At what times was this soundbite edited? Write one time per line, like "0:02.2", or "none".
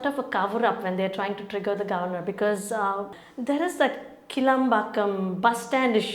0:03.2